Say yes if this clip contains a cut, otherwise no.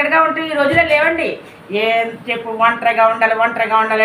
no